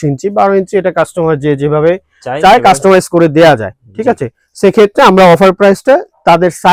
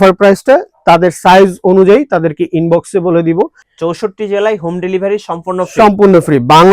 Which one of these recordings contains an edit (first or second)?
second